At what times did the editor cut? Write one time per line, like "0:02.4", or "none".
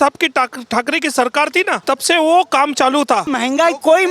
0:01.8
0:03.3